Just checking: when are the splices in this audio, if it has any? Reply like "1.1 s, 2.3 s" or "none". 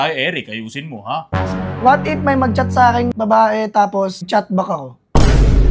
3.1 s, 4.3 s

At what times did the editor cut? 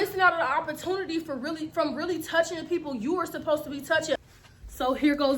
4.2 s

